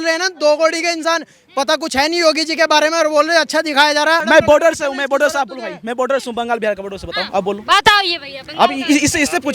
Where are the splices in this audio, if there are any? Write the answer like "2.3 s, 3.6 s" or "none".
4.2 s